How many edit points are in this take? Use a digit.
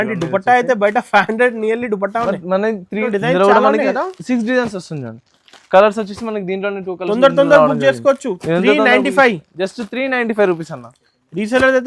1